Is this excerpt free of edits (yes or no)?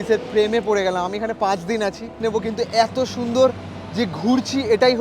no